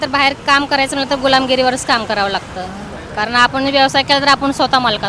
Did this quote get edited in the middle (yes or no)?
no